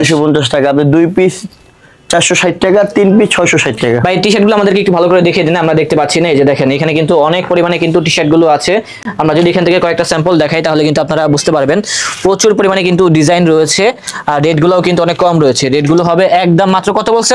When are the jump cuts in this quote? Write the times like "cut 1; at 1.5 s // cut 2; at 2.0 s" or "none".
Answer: none